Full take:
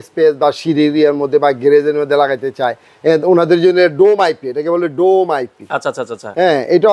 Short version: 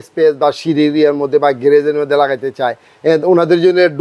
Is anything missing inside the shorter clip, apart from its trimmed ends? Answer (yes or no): no